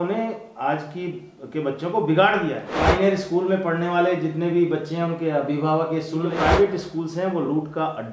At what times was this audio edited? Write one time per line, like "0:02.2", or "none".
0:02.6
0:06.3